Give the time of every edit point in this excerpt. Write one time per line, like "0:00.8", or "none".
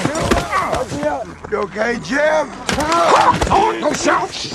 0:02.6